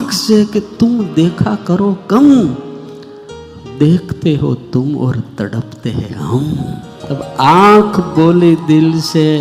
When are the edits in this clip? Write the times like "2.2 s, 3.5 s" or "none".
6.9 s